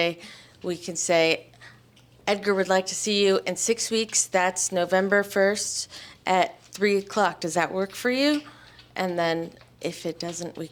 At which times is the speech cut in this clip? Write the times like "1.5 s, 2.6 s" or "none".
none